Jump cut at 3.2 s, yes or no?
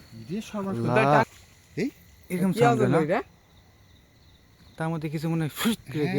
no